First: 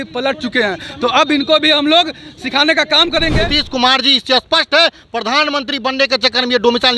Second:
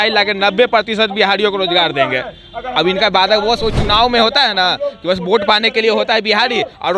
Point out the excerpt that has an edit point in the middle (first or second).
first